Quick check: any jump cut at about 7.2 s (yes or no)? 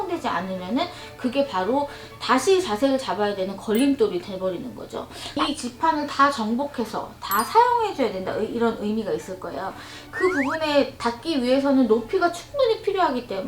no